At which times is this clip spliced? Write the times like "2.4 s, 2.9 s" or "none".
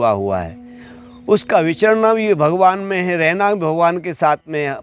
none